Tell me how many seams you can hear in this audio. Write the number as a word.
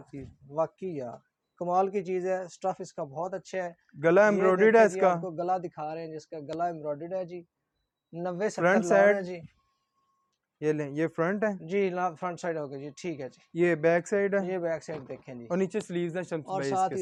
zero